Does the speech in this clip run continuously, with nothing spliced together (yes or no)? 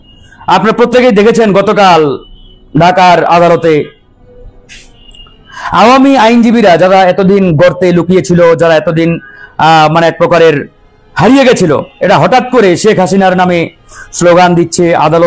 yes